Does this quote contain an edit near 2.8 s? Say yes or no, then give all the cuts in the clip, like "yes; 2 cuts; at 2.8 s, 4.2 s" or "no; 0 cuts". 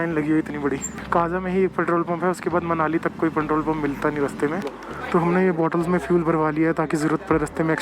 no; 2 cuts; at 1.0 s, 4.7 s